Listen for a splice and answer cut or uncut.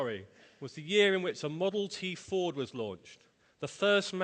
cut